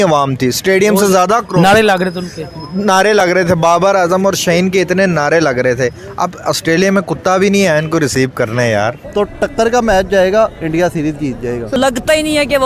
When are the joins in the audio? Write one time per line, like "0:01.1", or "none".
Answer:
0:09.0
0:11.8